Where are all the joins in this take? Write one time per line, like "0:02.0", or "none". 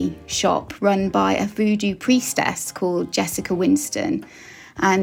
none